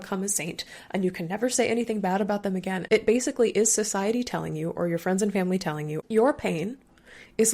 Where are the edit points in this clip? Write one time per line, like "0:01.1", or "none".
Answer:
0:02.8
0:05.9